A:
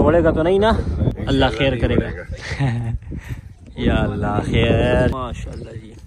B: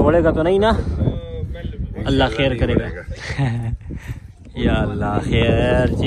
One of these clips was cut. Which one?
A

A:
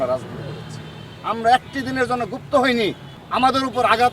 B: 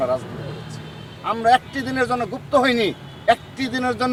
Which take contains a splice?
A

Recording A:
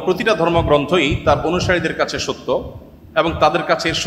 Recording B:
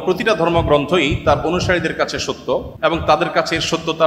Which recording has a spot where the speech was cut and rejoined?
B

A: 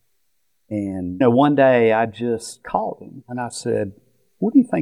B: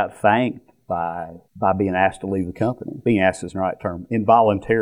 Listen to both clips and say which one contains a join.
B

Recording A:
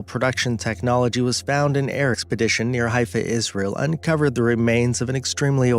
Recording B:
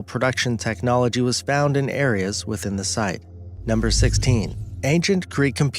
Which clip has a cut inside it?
B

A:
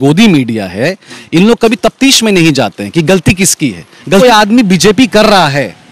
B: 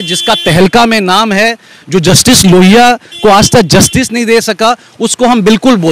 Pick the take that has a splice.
A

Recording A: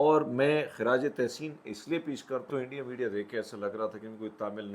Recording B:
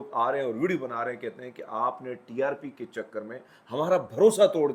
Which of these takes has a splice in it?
A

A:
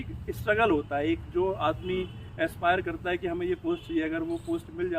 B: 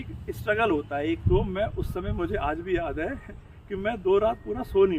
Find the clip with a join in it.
B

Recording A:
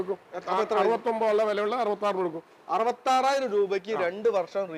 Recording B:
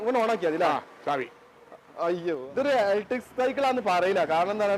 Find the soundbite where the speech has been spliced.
B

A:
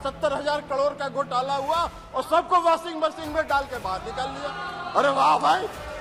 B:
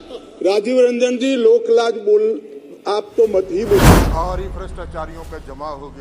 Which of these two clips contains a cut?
B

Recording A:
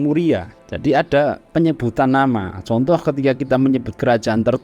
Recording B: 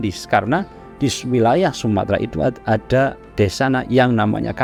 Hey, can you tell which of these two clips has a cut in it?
A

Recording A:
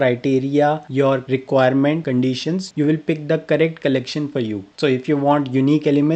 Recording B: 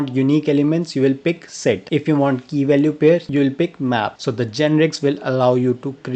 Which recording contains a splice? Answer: B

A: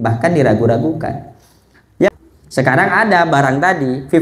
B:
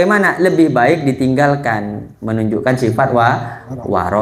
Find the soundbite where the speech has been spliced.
A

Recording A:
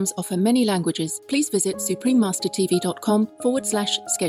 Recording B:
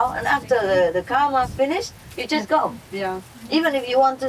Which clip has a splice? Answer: A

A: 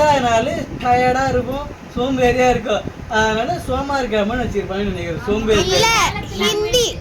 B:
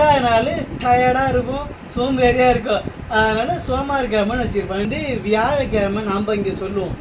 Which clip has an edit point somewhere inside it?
B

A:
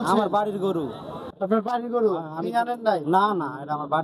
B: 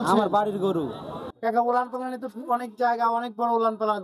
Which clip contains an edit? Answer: B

